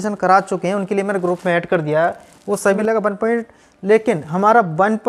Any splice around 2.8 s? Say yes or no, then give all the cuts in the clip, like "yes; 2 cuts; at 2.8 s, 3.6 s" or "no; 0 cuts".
yes; 1 cut; at 2.8 s